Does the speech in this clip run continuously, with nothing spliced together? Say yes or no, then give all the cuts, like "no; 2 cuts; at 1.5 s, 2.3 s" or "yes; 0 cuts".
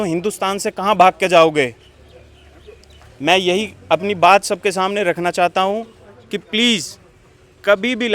yes; 0 cuts